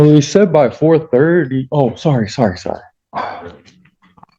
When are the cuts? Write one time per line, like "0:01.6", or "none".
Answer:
none